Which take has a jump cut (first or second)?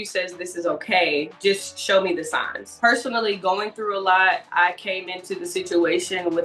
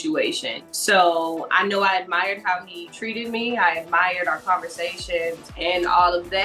second